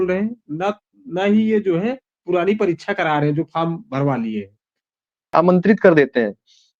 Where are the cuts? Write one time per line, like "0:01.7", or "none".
0:05.3